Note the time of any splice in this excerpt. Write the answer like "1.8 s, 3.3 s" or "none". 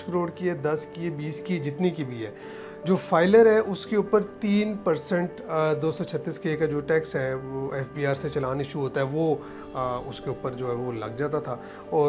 none